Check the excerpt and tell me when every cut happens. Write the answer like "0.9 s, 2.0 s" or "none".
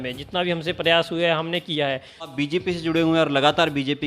2.2 s